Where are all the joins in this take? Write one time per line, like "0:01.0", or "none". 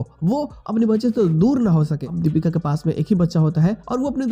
0:02.0